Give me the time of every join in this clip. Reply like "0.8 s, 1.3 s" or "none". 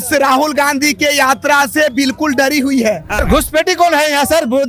3.2 s